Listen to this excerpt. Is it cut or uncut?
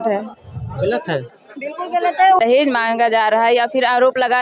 cut